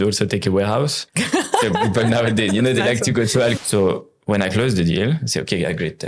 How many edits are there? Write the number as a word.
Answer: one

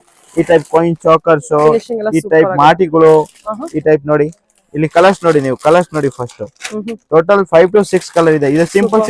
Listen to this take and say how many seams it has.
zero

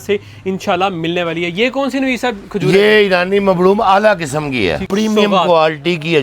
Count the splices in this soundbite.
one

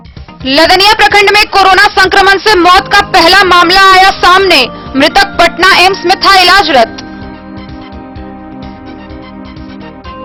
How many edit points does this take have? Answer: zero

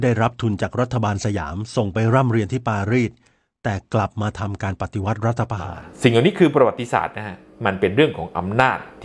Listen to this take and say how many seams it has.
one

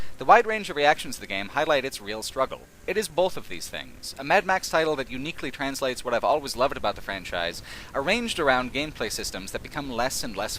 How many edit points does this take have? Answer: one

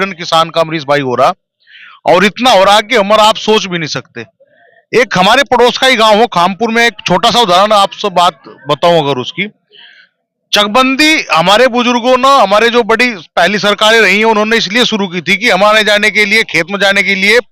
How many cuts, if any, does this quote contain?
zero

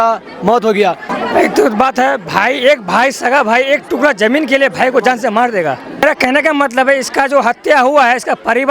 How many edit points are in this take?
two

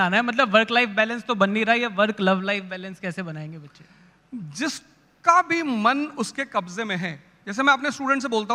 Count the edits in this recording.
zero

